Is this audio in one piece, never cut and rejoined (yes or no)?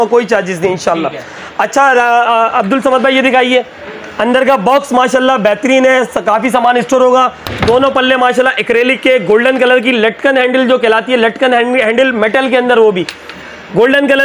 yes